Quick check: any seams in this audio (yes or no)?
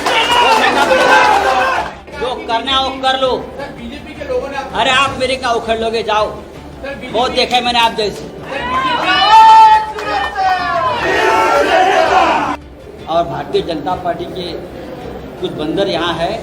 yes